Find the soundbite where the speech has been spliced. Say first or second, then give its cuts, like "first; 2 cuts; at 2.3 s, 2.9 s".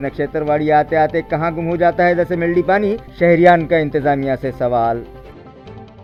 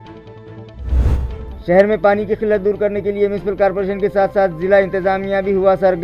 second; 1 cut; at 1.1 s